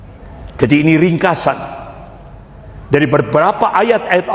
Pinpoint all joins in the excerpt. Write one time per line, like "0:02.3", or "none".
none